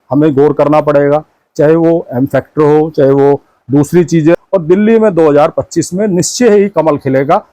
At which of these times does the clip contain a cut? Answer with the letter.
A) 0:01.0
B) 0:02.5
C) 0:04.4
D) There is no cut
C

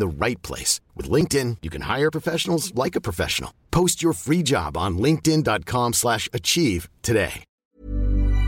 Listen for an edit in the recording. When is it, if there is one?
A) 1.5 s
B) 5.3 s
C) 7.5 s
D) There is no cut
C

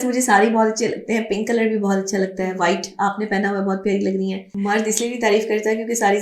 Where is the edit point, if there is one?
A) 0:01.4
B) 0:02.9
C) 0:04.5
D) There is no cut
C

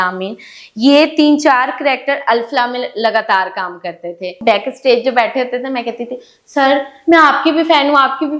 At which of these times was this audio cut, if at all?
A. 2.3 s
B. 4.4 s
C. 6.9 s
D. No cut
B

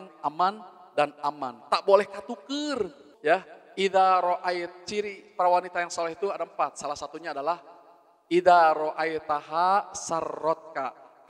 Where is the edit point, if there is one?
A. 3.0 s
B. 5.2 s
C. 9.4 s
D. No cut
A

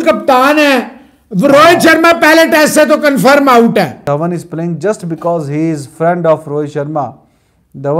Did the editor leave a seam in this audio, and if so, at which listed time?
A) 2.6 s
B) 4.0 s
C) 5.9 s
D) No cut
B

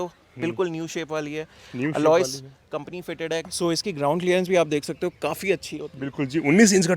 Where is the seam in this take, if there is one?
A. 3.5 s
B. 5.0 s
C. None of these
A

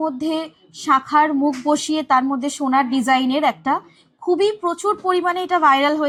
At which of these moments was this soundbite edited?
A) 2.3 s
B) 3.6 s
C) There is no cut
C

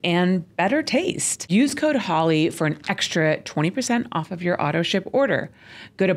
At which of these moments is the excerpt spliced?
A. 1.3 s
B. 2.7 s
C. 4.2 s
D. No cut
A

